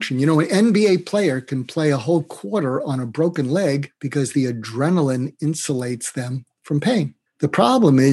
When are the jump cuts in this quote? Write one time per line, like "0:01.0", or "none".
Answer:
0:04.0